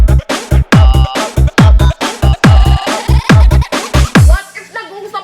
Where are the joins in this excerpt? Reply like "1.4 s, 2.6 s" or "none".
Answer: 4.2 s